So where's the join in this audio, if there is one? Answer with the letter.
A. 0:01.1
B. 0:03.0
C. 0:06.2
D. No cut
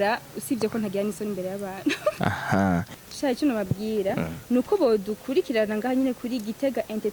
B